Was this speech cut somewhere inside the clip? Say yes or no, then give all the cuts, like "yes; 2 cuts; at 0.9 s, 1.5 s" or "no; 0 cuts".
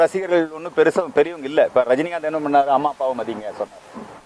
no; 0 cuts